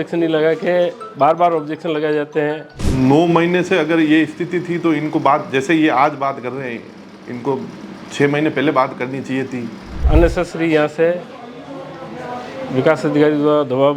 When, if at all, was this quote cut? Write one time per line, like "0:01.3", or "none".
0:02.7
0:10.0